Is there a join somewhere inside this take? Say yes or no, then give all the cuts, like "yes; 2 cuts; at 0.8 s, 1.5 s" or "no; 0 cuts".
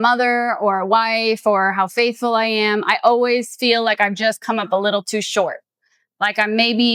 no; 0 cuts